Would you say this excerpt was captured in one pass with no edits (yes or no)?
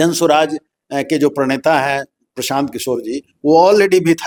yes